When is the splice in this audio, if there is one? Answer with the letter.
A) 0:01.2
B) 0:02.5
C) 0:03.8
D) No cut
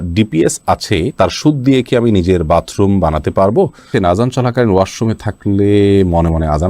C